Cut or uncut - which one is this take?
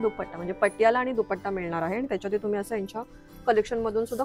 uncut